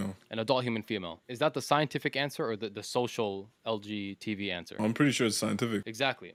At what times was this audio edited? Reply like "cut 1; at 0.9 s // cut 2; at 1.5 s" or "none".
none